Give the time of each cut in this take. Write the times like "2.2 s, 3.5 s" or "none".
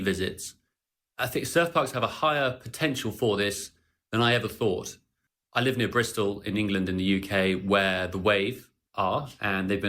none